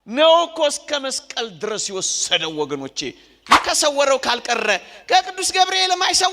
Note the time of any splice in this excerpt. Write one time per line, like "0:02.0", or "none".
0:03.5